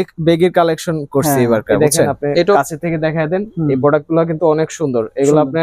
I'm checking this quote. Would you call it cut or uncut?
cut